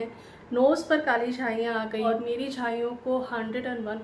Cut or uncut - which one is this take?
cut